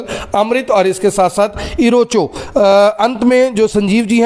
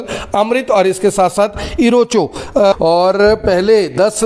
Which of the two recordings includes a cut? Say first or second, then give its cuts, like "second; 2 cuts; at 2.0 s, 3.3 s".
second; 1 cut; at 2.7 s